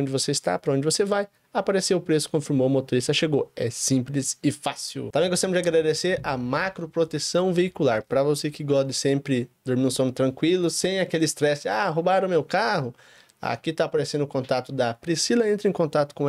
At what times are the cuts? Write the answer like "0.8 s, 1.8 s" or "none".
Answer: 5.0 s